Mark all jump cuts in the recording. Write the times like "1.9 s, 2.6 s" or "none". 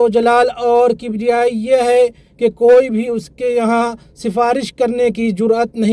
none